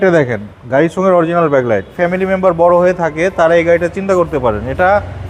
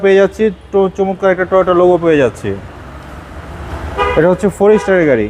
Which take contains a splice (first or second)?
first